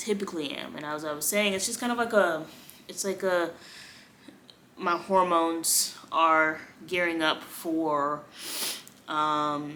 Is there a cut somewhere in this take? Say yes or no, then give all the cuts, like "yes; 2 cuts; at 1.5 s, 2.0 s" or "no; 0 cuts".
no; 0 cuts